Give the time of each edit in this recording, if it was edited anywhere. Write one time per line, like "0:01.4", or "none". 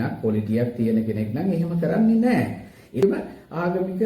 0:03.0